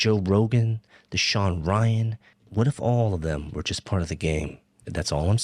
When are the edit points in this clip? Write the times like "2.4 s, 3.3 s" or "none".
2.1 s